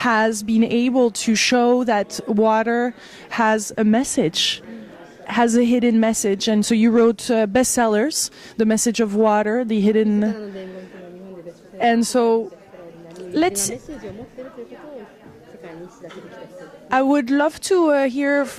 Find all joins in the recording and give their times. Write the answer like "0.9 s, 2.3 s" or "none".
none